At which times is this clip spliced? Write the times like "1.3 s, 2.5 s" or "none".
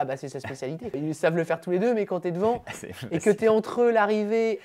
1.0 s